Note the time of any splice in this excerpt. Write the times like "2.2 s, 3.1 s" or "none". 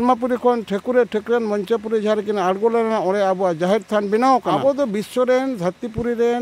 4.5 s